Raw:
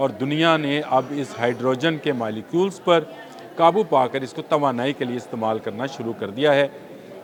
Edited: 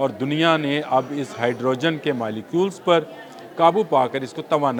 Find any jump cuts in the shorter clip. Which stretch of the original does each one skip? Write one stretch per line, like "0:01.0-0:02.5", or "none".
none